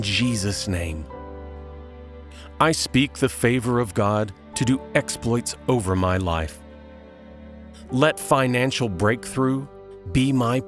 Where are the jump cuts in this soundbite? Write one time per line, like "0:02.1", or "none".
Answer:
0:06.5
0:07.9